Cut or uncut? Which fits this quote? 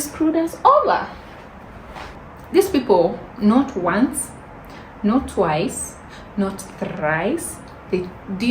cut